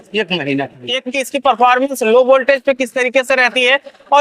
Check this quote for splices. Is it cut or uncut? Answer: cut